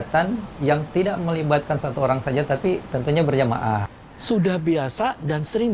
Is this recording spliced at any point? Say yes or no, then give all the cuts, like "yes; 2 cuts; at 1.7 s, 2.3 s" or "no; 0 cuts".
yes; 1 cut; at 3.9 s